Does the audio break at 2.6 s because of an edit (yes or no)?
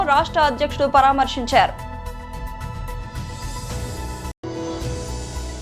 no